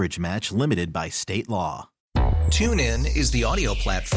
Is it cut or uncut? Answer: cut